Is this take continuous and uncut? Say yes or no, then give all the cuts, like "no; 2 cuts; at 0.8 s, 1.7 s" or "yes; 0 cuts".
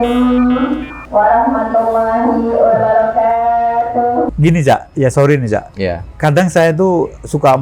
no; 1 cut; at 4.3 s